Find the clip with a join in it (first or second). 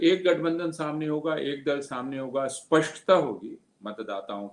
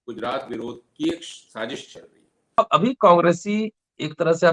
second